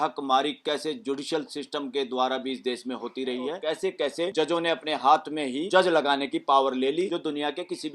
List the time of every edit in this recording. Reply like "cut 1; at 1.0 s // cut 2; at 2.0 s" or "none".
cut 1; at 4.0 s // cut 2; at 5.6 s // cut 3; at 7.1 s